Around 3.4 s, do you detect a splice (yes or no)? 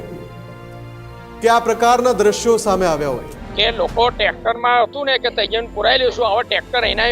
yes